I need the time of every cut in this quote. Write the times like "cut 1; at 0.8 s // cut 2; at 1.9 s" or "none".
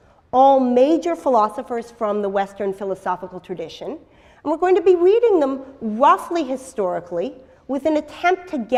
none